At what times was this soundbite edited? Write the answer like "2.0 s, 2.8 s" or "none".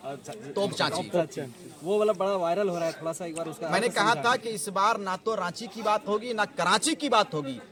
none